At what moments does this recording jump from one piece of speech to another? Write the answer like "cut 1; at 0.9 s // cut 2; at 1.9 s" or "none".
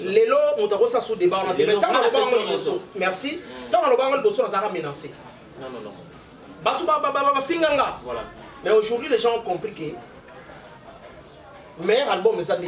none